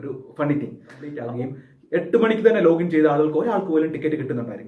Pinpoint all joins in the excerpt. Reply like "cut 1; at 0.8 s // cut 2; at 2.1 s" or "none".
cut 1; at 1.2 s

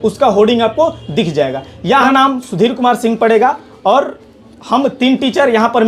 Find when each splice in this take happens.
cut 1; at 2.1 s

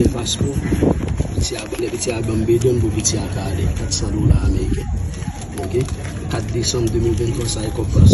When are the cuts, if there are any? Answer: none

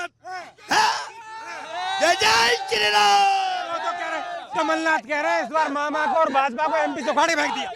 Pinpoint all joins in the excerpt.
none

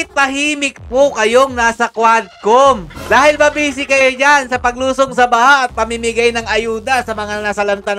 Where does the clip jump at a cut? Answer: cut 1; at 2.9 s

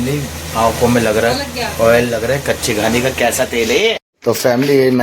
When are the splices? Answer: cut 1; at 4.1 s

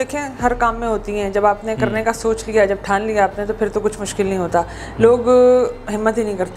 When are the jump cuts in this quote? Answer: none

